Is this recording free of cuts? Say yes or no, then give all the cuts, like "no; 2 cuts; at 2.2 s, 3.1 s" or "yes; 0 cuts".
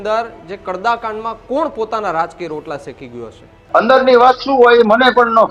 no; 1 cut; at 3.6 s